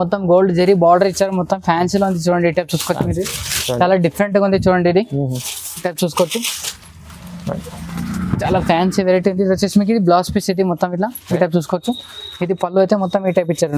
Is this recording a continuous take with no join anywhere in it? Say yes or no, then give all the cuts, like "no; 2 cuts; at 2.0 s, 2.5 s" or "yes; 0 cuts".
yes; 0 cuts